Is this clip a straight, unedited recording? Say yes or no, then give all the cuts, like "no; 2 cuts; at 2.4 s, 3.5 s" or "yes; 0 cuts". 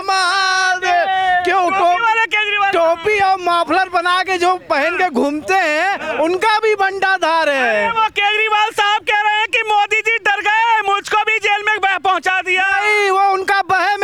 yes; 0 cuts